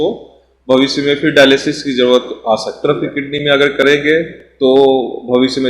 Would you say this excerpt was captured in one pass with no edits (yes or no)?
no